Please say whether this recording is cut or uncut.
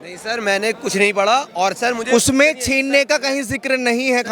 uncut